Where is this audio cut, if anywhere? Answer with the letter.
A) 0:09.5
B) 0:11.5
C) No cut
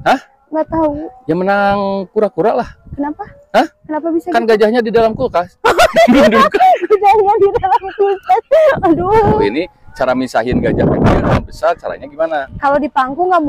A